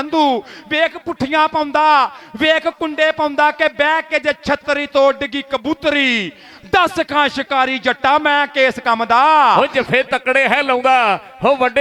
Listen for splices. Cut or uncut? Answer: cut